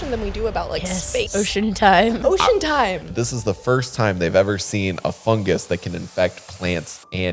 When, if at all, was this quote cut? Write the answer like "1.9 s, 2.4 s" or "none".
1.3 s, 2.2 s, 3.0 s